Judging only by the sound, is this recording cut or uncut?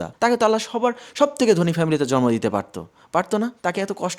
uncut